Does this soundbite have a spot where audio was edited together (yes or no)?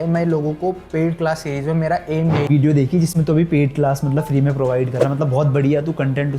yes